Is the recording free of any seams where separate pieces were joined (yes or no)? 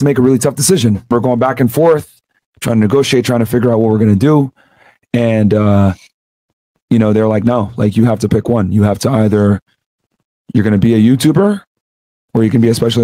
no